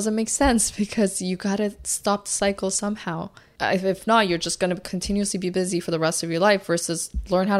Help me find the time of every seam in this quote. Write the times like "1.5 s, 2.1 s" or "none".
3.4 s